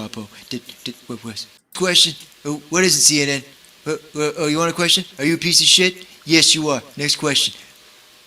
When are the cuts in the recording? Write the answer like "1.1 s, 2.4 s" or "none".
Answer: 1.7 s

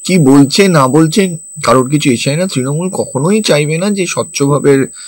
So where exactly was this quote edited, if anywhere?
none

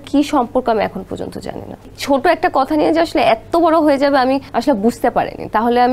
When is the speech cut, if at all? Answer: 1.9 s, 4.5 s

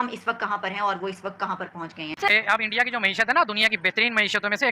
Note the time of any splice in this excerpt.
2.3 s

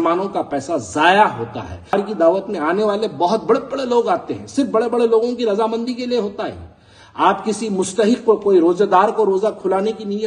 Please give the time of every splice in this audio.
1.9 s

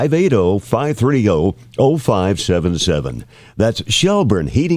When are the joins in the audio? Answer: none

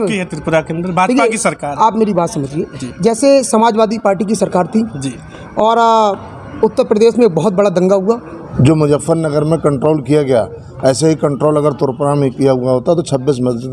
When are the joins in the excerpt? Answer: 8.4 s

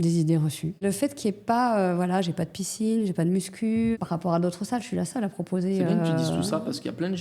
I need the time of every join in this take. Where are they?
0.8 s, 3.9 s

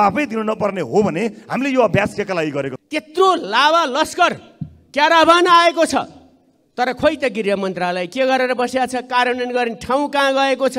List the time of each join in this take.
2.8 s

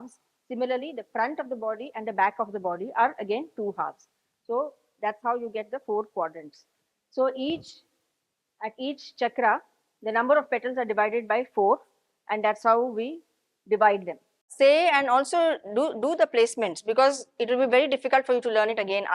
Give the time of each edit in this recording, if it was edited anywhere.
14.5 s

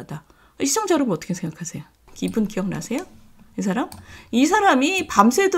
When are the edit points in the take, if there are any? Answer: 2.1 s

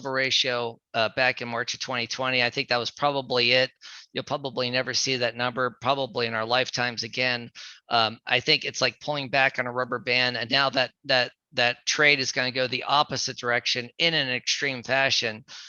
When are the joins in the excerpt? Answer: none

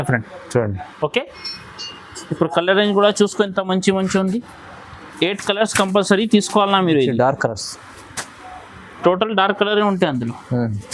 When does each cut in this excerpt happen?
none

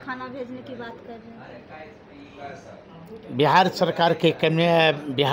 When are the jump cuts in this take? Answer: none

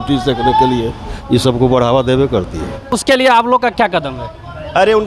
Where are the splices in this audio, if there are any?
3.0 s

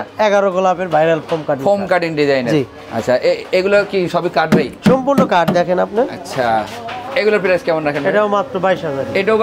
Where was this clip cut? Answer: none

